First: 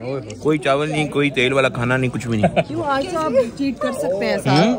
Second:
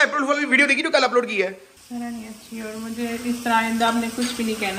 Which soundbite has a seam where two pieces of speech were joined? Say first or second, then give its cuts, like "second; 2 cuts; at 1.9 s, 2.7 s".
second; 1 cut; at 1.7 s